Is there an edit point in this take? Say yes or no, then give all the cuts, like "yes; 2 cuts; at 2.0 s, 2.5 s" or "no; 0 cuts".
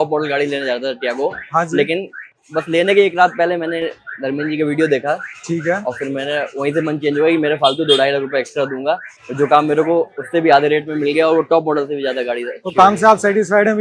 no; 0 cuts